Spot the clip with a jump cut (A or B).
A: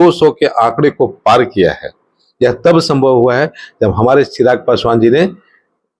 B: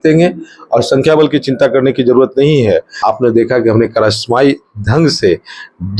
B